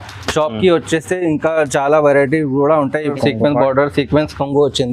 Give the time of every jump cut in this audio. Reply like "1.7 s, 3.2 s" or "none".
3.1 s